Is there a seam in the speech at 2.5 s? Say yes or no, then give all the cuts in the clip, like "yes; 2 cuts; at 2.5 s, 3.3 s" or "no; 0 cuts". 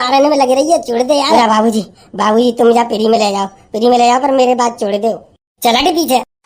no; 1 cut; at 1.3 s